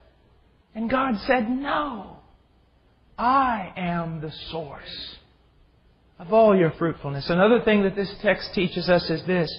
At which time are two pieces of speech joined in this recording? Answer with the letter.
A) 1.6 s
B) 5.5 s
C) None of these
A